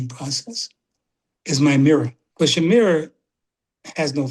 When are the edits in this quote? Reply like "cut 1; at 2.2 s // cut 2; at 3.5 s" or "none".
cut 1; at 2.2 s